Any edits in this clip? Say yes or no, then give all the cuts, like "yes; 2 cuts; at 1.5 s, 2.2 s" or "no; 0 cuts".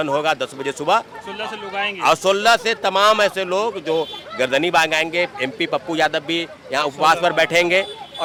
no; 0 cuts